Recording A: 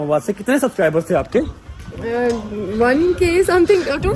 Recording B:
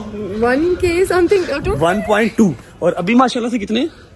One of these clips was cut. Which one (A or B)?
B